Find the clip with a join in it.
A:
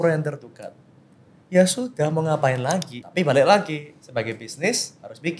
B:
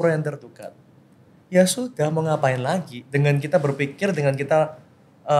A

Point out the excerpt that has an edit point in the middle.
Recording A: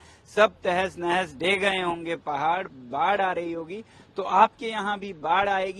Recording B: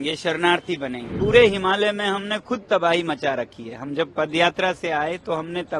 B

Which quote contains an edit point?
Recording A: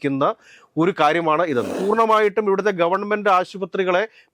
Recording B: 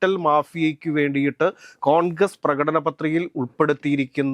A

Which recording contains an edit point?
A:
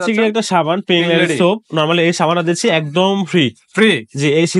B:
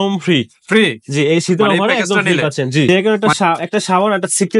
B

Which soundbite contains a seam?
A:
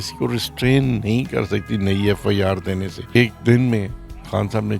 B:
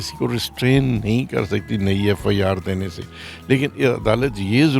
A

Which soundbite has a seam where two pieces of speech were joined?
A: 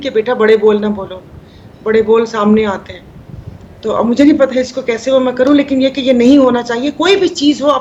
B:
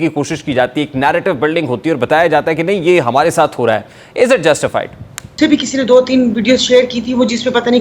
B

